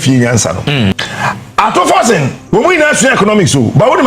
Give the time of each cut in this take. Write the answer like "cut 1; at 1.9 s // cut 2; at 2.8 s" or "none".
cut 1; at 1.1 s // cut 2; at 2.4 s